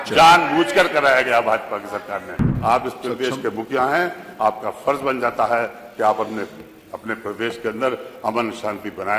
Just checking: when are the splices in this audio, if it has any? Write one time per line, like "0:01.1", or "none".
0:02.5